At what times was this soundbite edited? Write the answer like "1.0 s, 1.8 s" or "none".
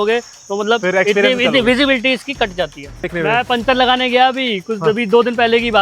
3.1 s